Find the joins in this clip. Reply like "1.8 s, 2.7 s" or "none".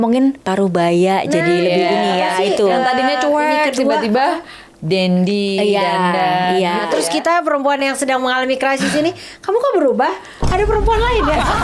none

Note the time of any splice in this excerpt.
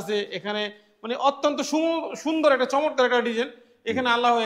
none

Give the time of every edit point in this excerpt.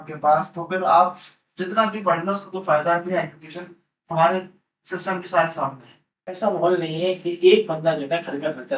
6.3 s

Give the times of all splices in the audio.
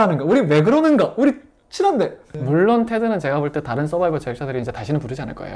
2.3 s

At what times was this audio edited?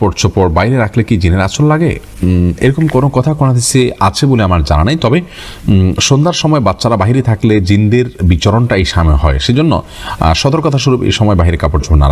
none

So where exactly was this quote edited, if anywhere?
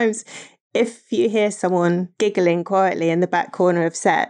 2.1 s

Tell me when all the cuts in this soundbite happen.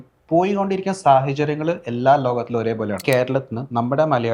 3.0 s

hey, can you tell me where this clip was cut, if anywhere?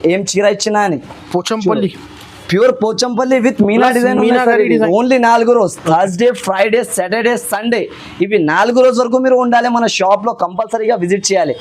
4.7 s

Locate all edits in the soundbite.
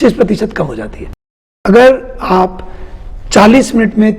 1.5 s

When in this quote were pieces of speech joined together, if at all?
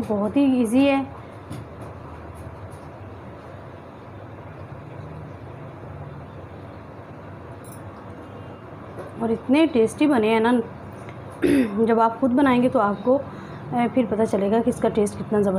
8.6 s

